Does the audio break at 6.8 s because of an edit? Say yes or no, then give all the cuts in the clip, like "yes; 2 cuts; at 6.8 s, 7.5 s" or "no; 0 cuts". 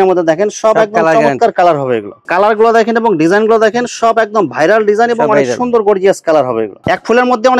yes; 2 cuts; at 2.2 s, 6.8 s